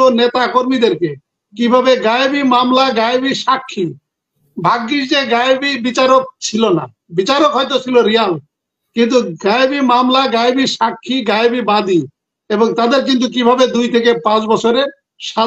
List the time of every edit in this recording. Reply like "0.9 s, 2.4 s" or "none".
none